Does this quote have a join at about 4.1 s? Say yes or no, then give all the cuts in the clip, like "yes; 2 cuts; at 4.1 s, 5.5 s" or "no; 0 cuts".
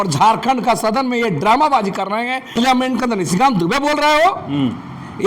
no; 1 cut; at 2.6 s